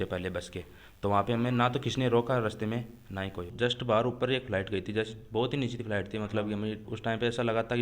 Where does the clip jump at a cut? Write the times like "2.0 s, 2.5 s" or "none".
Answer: 3.5 s, 6.9 s